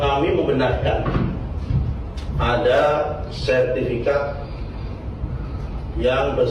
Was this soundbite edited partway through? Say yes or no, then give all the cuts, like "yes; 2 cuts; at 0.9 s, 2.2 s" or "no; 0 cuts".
no; 0 cuts